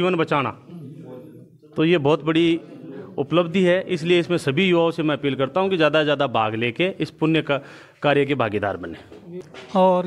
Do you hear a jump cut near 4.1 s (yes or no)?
no